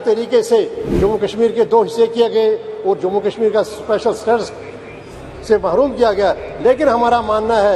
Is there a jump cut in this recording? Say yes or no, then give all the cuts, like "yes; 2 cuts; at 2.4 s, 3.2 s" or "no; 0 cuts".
no; 0 cuts